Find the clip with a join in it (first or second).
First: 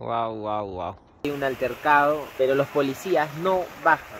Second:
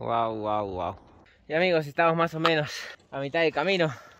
first